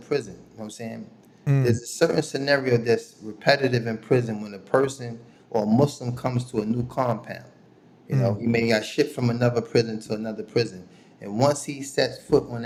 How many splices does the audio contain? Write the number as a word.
zero